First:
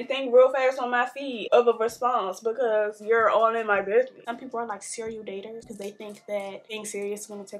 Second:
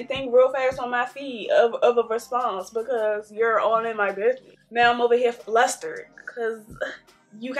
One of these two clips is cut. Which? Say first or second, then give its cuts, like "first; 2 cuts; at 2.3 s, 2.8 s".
first; 4 cuts; at 1.5 s, 4.3 s, 5.7 s, 6.7 s